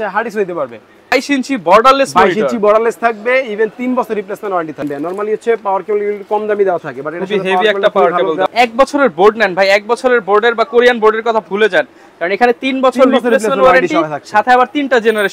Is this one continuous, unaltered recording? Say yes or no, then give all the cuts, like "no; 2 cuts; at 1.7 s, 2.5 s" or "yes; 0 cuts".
no; 3 cuts; at 1.1 s, 4.9 s, 8.5 s